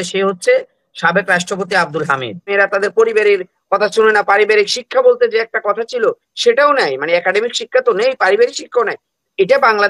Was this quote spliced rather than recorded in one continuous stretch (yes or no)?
yes